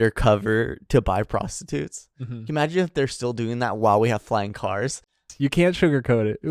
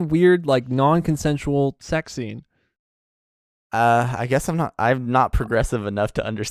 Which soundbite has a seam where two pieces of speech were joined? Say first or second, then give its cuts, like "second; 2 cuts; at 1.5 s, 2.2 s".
first; 1 cut; at 5.3 s